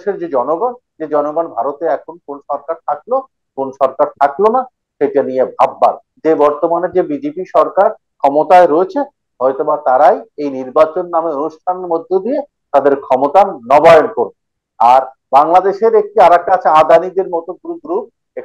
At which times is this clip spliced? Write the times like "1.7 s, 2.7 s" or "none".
6.1 s